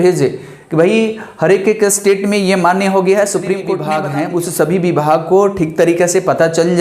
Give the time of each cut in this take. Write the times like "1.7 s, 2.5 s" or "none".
3.9 s